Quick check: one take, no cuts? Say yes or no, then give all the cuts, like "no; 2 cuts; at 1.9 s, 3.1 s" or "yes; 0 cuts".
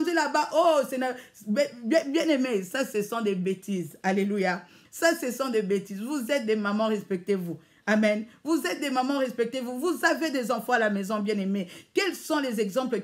yes; 0 cuts